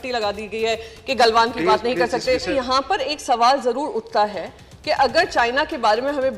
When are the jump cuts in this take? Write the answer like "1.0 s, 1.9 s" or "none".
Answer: 2.5 s